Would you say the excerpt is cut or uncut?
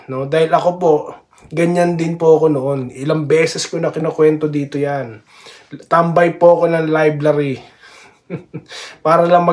uncut